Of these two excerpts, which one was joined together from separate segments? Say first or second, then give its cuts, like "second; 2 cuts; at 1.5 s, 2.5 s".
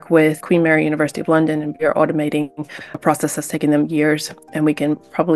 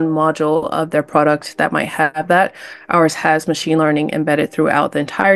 first; 1 cut; at 1.7 s